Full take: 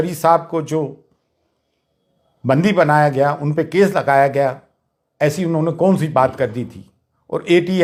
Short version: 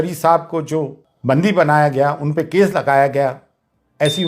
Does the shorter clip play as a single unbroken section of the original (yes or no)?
no